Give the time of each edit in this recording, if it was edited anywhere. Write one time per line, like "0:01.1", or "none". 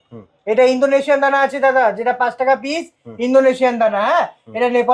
none